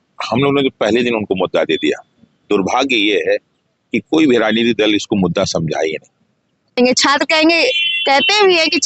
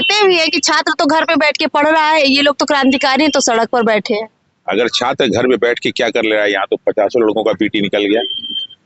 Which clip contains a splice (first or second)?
first